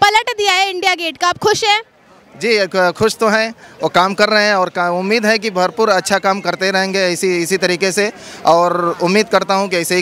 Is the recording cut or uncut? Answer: uncut